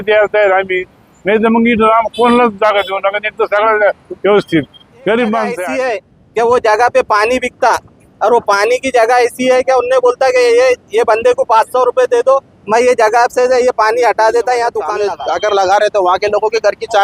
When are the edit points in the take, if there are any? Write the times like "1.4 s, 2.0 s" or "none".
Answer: 5.6 s, 15.0 s